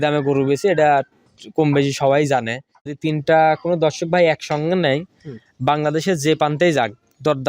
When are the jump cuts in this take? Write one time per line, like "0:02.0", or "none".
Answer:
0:03.0